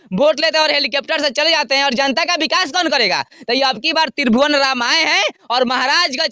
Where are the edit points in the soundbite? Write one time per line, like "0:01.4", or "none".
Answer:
none